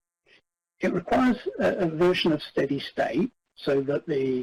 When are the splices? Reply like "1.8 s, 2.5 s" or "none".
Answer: none

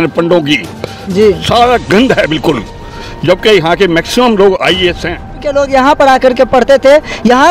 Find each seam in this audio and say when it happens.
5.4 s

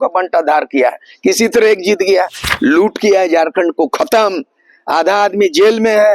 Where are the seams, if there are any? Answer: 2.4 s

